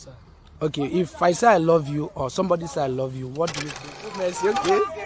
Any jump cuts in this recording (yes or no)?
yes